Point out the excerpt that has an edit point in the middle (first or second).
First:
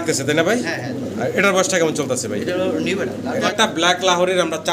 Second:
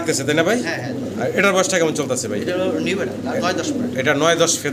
first